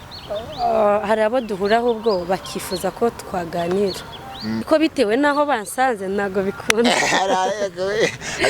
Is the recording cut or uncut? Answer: cut